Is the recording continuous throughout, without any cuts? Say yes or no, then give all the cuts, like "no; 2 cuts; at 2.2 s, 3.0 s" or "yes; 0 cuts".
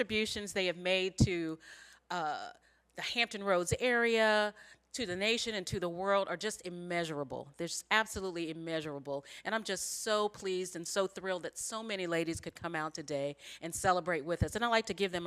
no; 1 cut; at 5.4 s